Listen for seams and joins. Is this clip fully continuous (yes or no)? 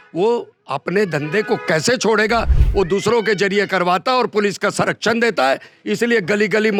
yes